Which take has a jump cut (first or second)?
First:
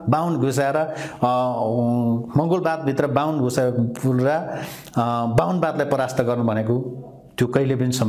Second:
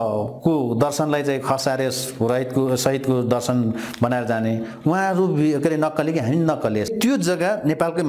second